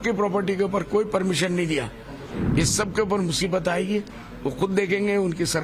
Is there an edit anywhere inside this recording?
yes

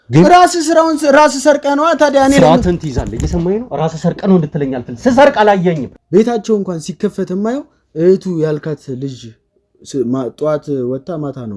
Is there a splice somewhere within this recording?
yes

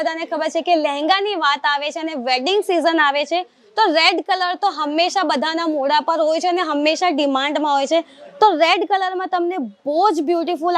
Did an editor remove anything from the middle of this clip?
no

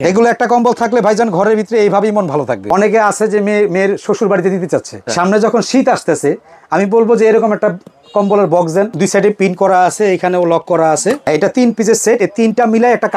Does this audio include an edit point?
yes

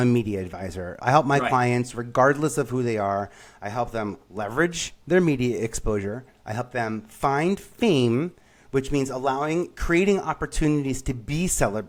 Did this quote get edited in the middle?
no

